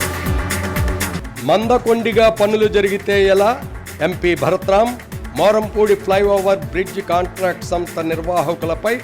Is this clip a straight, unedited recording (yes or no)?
yes